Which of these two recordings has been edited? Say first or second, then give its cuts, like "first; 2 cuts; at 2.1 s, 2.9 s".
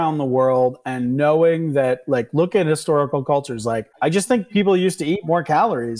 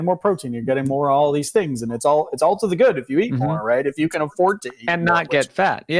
first; 1 cut; at 3.9 s